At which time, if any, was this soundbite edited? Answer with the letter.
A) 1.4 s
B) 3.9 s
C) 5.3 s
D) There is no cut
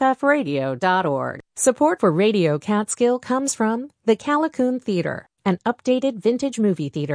A